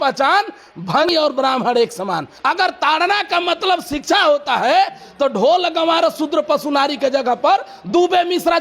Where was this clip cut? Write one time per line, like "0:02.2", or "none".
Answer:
0:01.1
0:02.3